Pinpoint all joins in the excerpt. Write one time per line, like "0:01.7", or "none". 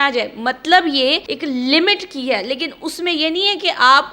0:01.3